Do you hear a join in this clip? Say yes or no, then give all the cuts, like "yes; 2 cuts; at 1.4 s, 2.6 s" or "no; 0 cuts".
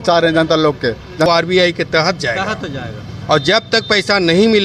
yes; 1 cut; at 1.3 s